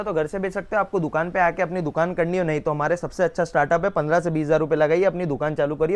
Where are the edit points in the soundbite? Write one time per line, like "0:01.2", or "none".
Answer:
none